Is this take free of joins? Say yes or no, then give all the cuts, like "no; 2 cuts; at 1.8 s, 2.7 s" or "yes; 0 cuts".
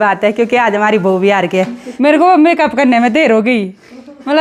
no; 1 cut; at 1.8 s